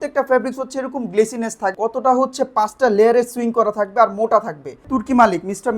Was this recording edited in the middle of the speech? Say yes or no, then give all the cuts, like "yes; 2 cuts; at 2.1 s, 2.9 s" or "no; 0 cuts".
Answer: yes; 2 cuts; at 1.7 s, 4.8 s